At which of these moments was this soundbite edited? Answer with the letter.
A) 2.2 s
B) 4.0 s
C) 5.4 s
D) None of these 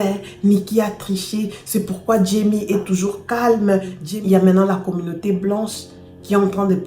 B